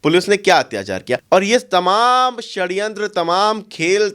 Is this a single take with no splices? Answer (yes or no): no